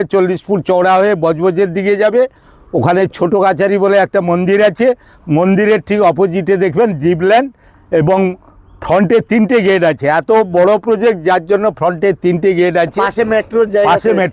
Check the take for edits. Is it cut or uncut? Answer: uncut